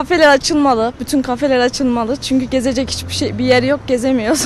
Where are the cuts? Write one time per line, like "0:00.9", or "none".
none